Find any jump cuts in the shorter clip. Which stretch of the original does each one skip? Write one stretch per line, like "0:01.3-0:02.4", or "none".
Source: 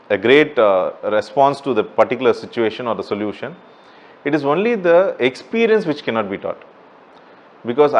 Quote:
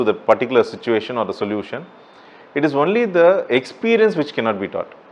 none